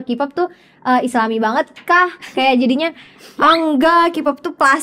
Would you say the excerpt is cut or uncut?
uncut